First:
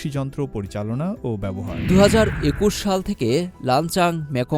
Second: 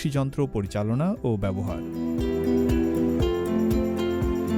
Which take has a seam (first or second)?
first